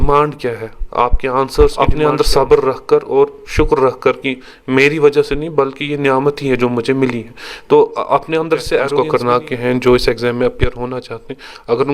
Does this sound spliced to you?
yes; 2 cuts; at 1.7 s, 8.9 s

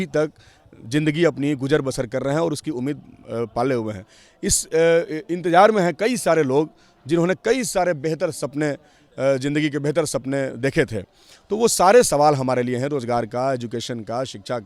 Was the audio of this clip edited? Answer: no; 0 cuts

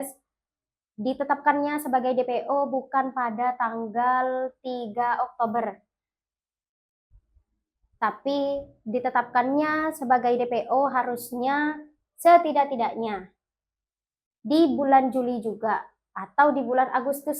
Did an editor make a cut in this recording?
no; 0 cuts

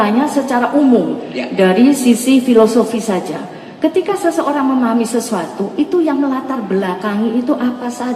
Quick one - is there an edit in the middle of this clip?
no; 0 cuts

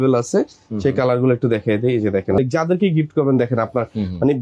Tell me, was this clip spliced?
yes; 1 cut; at 2.4 s

